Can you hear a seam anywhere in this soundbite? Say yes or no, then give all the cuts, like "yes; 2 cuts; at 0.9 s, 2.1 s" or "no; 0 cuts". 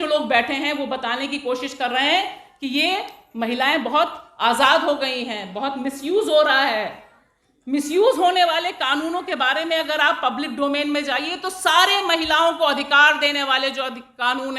no; 0 cuts